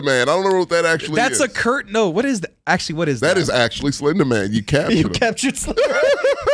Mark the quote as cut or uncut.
uncut